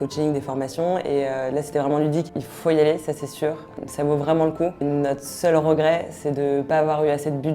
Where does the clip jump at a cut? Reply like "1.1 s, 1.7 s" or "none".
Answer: 2.3 s, 3.7 s, 4.8 s

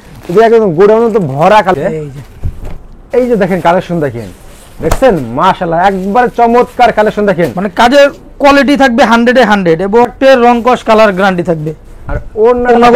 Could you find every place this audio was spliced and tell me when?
1.7 s, 10.1 s

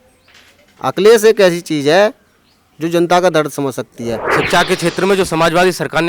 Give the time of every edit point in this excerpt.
4.3 s

